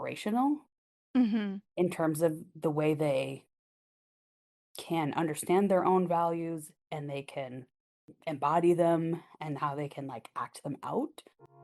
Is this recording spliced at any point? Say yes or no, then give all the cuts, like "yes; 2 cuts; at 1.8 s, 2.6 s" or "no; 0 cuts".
yes; 1 cut; at 8.1 s